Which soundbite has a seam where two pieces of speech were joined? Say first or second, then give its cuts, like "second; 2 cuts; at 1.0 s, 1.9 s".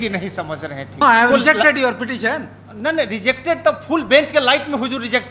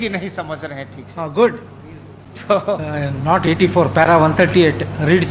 first; 1 cut; at 1.0 s